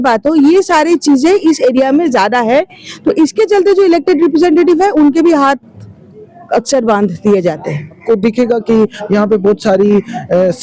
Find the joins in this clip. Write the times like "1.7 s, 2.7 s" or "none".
8.0 s